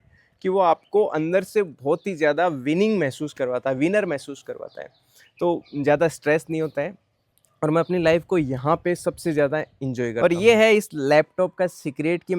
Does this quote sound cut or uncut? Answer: cut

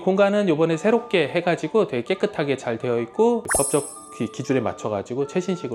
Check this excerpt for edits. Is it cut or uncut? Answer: uncut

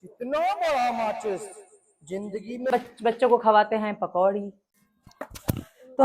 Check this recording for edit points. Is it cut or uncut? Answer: cut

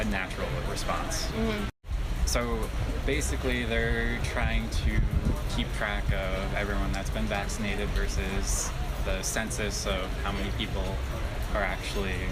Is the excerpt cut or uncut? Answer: uncut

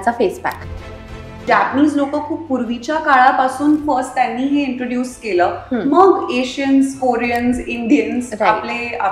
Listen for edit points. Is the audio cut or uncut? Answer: cut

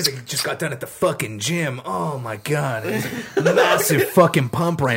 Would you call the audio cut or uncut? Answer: uncut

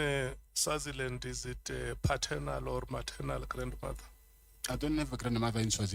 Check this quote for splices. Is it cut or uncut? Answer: uncut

